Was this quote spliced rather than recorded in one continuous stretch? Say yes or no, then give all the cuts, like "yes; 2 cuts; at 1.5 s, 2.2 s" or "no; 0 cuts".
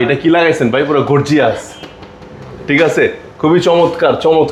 no; 0 cuts